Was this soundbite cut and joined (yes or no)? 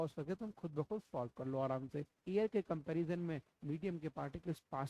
yes